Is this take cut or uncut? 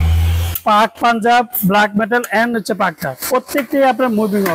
uncut